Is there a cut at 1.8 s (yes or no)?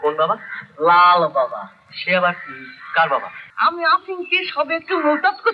no